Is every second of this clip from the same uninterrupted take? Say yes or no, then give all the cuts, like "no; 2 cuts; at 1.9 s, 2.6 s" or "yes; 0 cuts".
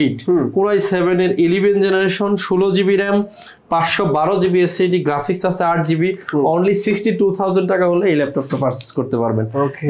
yes; 0 cuts